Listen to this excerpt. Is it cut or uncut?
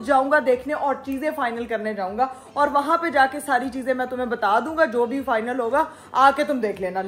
uncut